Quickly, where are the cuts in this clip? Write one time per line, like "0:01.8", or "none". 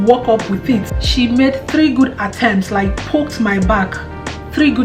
0:01.0